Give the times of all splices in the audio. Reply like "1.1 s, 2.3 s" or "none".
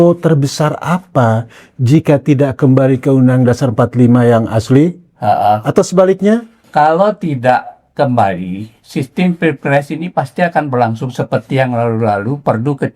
6.6 s